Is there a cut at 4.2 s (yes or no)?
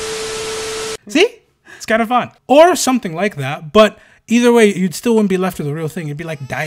no